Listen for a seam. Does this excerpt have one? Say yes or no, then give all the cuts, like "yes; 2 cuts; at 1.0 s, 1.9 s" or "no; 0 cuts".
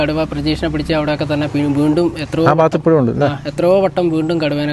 no; 0 cuts